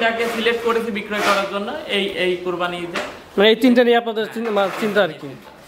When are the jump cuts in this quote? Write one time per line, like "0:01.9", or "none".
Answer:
none